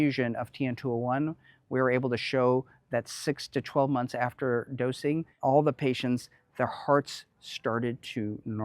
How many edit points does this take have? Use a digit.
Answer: 1